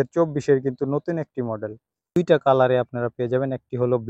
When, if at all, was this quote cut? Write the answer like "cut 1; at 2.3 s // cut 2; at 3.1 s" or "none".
cut 1; at 2.2 s